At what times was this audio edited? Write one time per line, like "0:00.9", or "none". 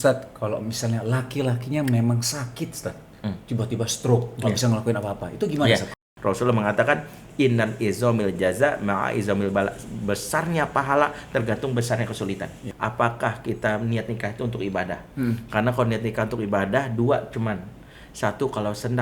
0:05.9
0:12.6